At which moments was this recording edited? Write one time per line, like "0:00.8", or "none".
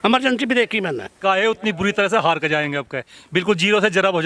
0:01.2